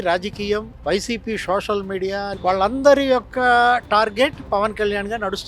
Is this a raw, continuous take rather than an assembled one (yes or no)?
no